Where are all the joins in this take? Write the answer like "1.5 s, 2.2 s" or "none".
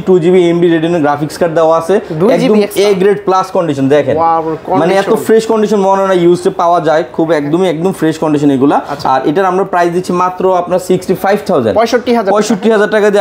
none